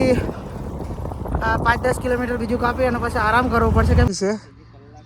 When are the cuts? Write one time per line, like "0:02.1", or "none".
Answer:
0:04.1